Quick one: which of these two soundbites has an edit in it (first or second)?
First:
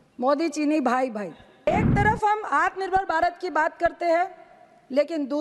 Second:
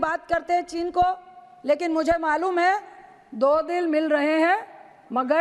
first